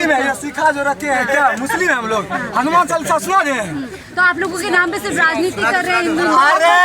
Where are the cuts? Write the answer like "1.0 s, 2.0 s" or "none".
none